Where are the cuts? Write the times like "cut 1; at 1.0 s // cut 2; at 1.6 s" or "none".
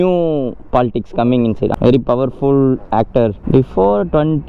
cut 1; at 1.7 s // cut 2; at 3.4 s